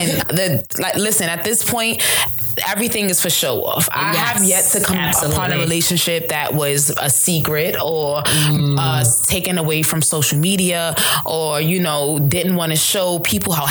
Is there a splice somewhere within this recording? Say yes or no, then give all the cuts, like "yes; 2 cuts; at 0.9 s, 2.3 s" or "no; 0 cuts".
no; 0 cuts